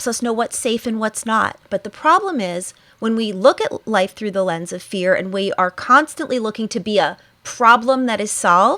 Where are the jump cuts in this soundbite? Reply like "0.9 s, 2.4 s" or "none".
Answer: 1.6 s

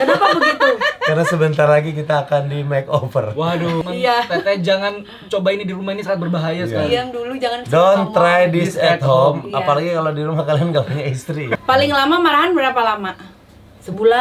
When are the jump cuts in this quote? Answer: 3.8 s, 11.6 s

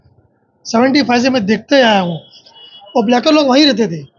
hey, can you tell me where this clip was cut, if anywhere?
2.5 s

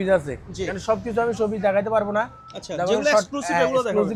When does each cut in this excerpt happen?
none

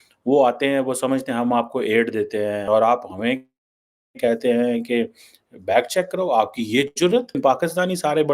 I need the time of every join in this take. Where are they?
2.6 s

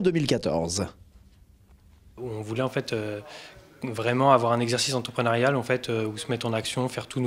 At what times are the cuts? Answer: 4.8 s

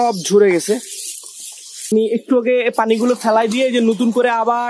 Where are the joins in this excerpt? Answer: 1.9 s

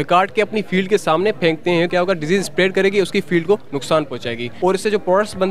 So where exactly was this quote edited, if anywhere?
1.9 s, 4.5 s

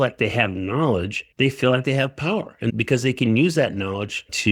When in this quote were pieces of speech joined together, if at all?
none

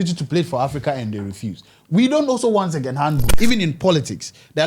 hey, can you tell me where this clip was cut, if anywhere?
3.3 s

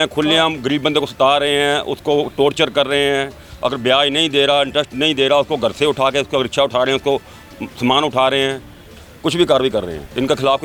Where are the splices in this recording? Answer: none

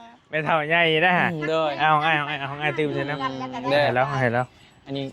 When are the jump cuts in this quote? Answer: none

